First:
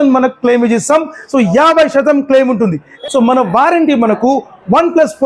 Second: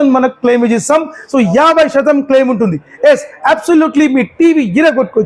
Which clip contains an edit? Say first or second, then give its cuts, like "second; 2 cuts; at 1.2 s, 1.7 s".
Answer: first; 1 cut; at 2.9 s